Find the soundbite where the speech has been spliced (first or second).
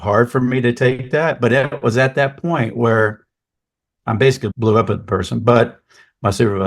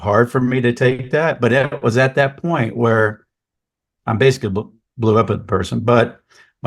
first